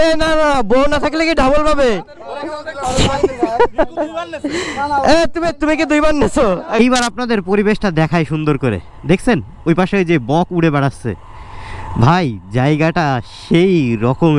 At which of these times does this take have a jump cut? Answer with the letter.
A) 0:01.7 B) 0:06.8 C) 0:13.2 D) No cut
B